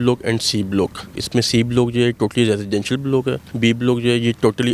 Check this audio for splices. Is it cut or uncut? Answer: cut